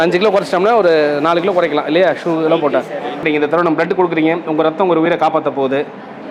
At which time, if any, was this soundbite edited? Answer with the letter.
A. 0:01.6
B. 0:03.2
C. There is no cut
B